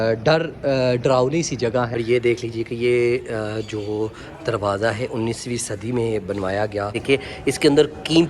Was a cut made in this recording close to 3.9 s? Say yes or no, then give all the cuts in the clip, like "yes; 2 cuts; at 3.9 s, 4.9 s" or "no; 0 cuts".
no; 2 cuts; at 1.9 s, 7.0 s